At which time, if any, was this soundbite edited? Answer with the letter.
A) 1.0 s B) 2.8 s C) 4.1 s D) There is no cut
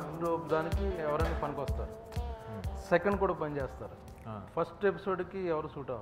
D